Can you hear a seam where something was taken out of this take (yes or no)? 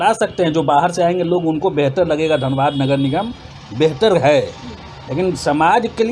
no